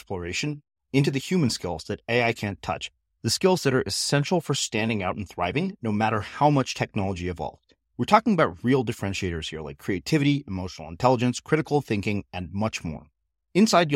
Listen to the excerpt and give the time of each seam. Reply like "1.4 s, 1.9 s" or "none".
none